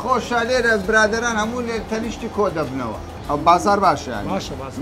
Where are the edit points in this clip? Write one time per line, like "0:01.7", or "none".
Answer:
0:03.1